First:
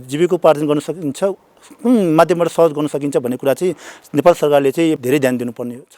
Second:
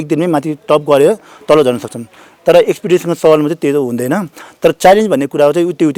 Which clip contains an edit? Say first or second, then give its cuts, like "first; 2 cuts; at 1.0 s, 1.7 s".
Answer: first; 1 cut; at 5.0 s